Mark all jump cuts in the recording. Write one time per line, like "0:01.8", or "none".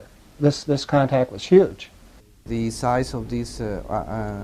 0:02.4